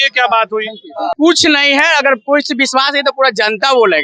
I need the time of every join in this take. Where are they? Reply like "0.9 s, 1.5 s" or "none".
1.1 s